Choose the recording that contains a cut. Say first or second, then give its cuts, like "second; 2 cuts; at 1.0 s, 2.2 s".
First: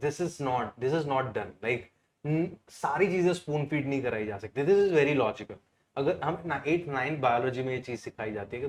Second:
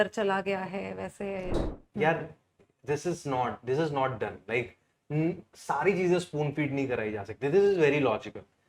second; 1 cut; at 1.6 s